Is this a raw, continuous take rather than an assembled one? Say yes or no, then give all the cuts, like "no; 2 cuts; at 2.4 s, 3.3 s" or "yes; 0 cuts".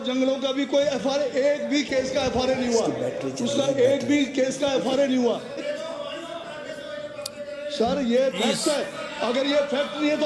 yes; 0 cuts